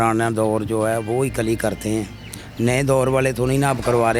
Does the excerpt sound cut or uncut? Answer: uncut